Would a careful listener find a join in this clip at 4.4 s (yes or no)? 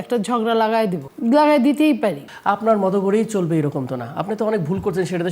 no